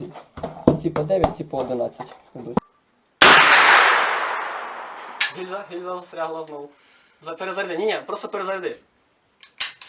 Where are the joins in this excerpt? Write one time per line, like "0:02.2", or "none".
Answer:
0:02.6